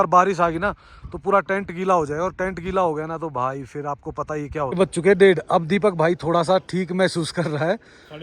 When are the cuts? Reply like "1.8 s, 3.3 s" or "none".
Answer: 4.7 s